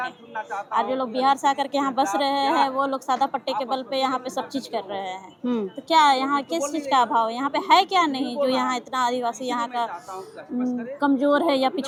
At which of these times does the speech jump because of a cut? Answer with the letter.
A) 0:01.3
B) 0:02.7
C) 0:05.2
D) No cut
D